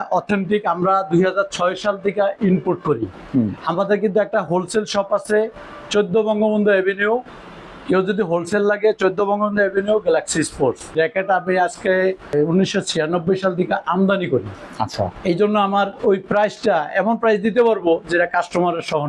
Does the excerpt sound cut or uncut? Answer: cut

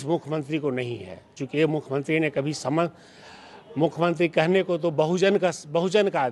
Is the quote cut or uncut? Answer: uncut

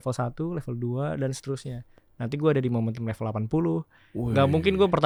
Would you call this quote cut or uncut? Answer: uncut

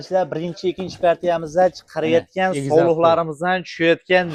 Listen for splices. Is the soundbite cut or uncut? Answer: uncut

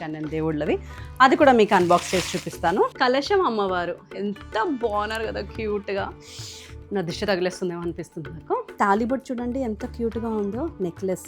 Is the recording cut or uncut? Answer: cut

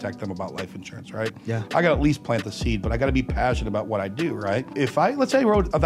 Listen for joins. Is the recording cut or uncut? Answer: cut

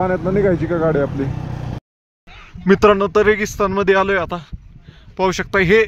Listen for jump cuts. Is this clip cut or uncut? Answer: cut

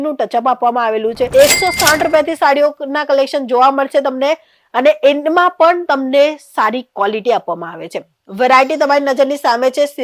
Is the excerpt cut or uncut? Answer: cut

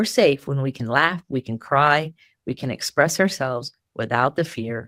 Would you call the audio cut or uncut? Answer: uncut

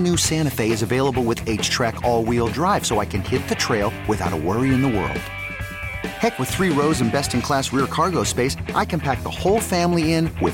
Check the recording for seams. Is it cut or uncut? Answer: uncut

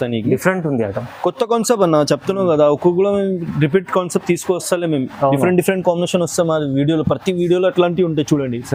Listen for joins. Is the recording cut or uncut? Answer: uncut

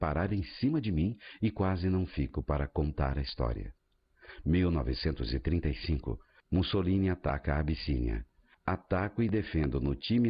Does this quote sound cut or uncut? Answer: cut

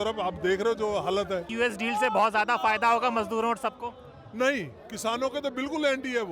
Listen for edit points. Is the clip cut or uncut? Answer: cut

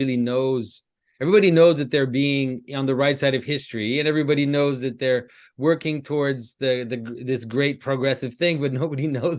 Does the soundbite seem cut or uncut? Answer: uncut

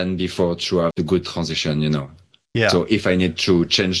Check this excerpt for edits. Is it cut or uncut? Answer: cut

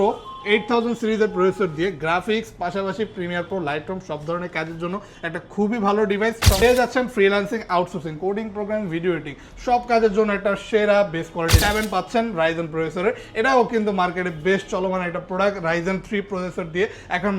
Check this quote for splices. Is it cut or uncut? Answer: cut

